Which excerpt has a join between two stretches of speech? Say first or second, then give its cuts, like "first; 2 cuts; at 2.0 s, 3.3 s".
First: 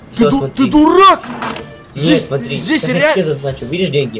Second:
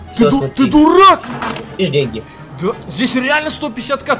second; 1 cut; at 1.7 s